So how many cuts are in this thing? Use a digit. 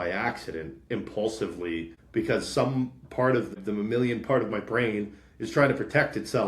2